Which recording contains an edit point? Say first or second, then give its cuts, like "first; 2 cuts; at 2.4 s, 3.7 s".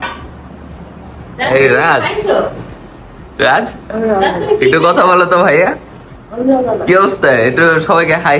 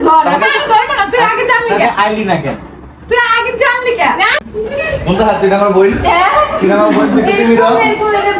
second; 1 cut; at 4.4 s